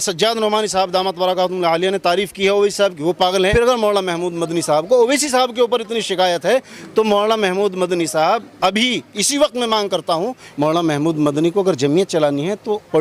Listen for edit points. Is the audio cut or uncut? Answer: cut